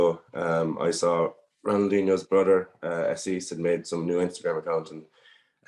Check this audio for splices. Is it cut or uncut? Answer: uncut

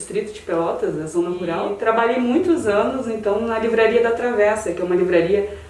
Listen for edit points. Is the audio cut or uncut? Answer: cut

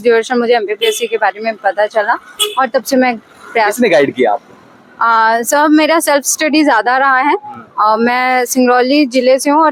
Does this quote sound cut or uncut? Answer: uncut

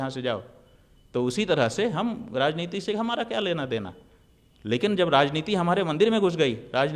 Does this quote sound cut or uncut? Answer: uncut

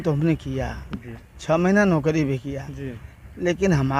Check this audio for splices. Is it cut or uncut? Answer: uncut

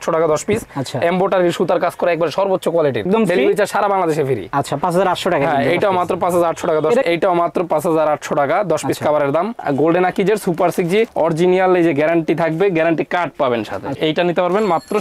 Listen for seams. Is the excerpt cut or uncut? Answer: cut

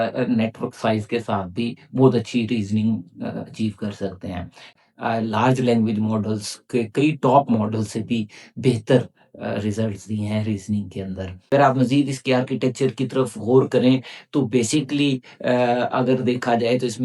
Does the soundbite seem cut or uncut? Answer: cut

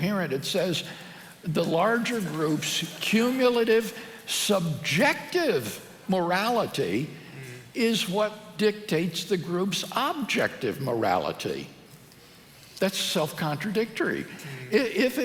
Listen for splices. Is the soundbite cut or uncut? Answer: uncut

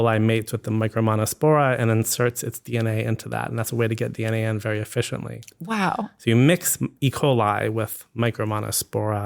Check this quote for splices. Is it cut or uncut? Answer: uncut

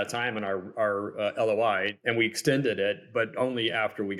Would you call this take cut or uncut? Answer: cut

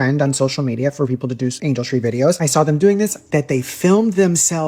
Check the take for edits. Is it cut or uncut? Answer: cut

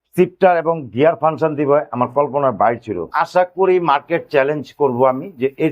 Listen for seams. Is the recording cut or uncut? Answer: cut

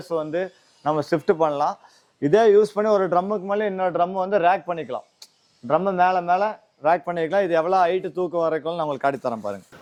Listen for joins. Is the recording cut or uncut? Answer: uncut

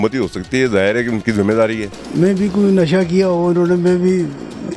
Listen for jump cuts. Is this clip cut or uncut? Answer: cut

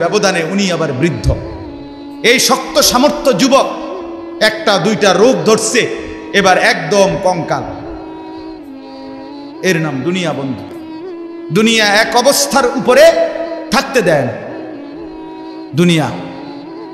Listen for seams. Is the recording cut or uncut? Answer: uncut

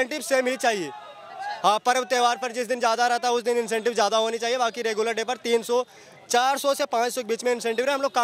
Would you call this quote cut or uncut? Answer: uncut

